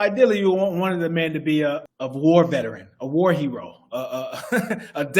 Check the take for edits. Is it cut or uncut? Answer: cut